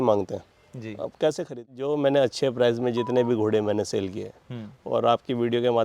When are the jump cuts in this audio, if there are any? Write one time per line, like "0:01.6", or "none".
0:01.9